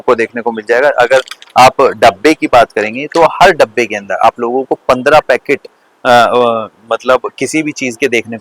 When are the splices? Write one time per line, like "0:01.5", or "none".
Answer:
none